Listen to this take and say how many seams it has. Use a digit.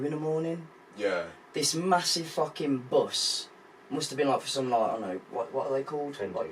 0